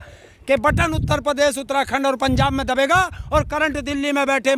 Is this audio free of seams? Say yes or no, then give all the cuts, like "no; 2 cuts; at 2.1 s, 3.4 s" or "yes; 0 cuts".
yes; 0 cuts